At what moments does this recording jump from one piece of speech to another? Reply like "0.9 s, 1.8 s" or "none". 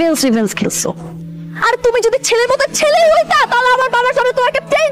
1.1 s